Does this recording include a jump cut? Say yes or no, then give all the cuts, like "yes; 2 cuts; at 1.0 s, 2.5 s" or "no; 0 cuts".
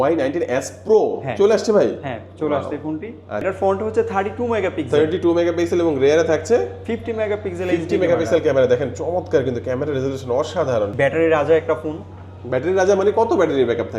yes; 2 cuts; at 3.4 s, 10.9 s